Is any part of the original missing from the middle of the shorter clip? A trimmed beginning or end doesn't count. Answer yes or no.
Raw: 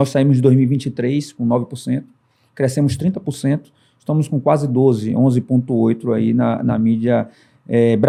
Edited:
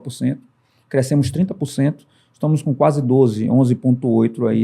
no